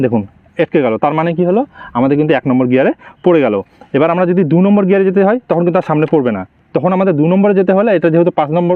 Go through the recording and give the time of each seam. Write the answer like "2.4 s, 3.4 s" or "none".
none